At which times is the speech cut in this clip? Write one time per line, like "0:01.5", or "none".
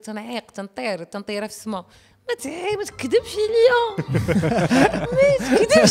none